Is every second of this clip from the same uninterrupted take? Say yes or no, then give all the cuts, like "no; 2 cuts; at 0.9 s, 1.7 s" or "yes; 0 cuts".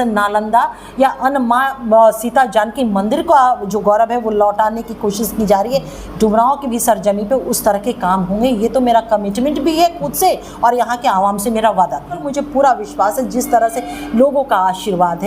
no; 1 cut; at 12.2 s